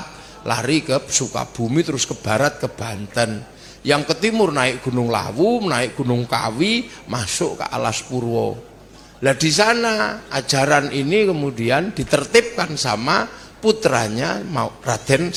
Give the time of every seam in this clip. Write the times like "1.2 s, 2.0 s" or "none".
none